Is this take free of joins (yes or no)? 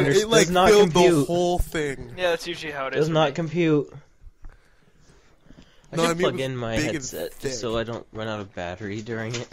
yes